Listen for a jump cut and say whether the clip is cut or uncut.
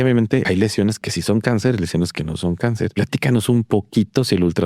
cut